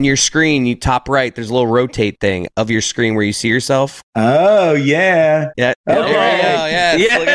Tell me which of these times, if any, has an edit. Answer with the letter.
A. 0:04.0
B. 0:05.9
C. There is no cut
A